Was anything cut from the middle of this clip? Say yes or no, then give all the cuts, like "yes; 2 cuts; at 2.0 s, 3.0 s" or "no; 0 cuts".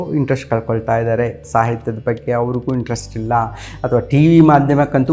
no; 0 cuts